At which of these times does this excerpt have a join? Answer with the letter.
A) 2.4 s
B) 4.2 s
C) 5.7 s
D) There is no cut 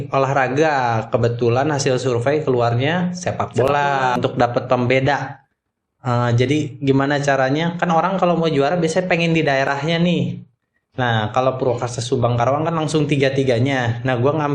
B